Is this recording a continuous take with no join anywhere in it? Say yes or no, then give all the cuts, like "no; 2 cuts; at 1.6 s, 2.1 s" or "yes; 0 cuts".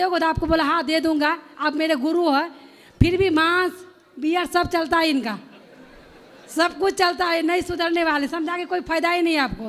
yes; 0 cuts